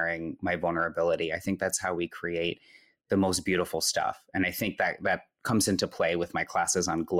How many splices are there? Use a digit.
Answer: 0